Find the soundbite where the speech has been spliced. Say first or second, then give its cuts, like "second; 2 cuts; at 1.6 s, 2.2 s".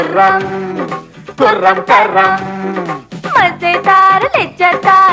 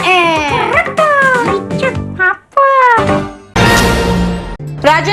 second; 1 cut; at 3.4 s